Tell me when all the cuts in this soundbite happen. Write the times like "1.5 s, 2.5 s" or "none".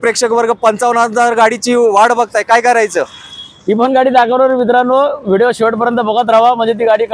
none